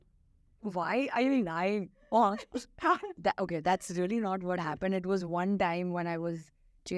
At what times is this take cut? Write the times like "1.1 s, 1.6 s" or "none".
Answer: none